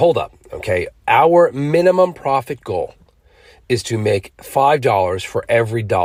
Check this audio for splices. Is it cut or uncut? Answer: uncut